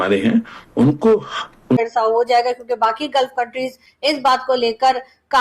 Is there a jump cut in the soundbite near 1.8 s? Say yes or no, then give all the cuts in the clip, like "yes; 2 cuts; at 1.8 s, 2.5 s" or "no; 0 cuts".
yes; 1 cut; at 1.8 s